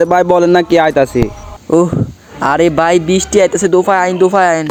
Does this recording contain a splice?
no; 0 cuts

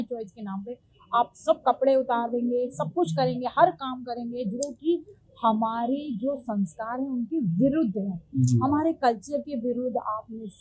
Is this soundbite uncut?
yes; 0 cuts

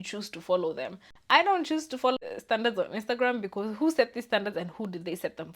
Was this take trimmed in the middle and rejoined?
yes; 1 cut; at 2.3 s

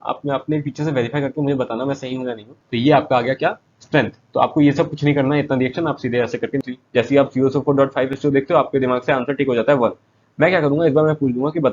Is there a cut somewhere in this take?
yes; 2 cuts; at 2.6 s, 6.6 s

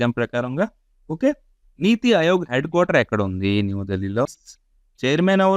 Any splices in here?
yes; 1 cut; at 4.3 s

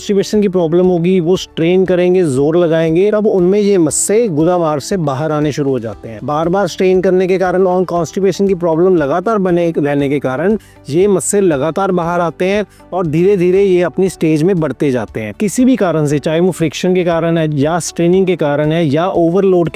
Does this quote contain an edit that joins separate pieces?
yes; 1 cut; at 15.2 s

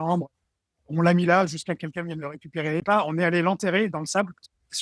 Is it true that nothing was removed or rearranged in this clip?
no; 1 cut; at 2.8 s

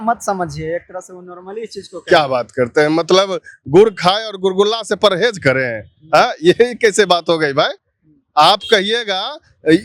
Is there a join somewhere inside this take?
no; 0 cuts

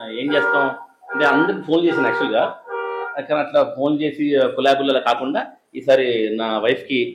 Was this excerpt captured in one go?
yes; 0 cuts

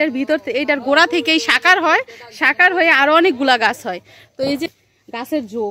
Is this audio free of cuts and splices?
no; 1 cut; at 4.7 s

